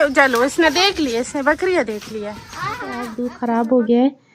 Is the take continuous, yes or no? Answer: no